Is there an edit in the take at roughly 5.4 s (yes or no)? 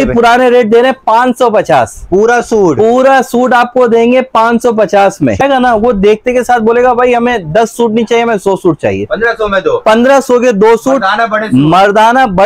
yes